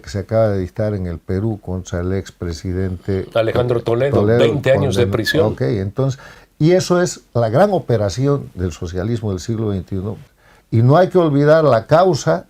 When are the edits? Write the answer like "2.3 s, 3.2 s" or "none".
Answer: 10.2 s